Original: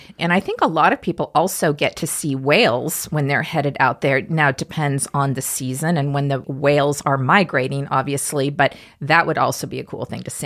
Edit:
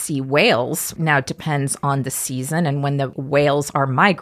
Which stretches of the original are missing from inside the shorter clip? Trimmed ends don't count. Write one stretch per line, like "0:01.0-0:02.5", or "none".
0:03.1-0:04.2

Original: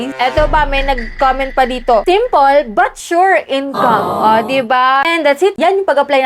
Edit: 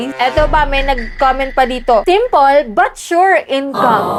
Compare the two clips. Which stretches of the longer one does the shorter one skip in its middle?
none

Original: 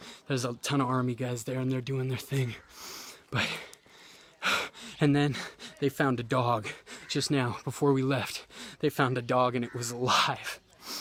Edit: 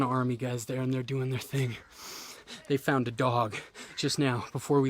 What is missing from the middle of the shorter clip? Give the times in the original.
0:03.2-0:05.5

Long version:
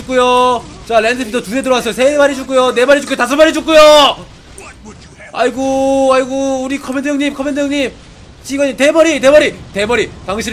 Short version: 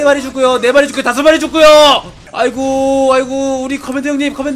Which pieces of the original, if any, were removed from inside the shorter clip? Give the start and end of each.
0:04.3-0:05.2

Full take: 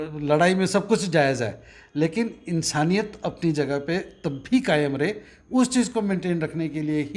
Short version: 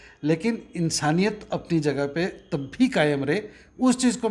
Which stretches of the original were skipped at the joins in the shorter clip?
none

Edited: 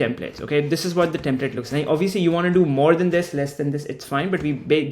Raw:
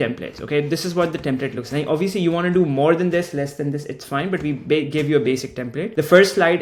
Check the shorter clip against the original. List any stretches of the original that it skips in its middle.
none

